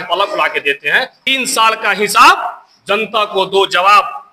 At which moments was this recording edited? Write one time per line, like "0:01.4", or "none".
0:01.2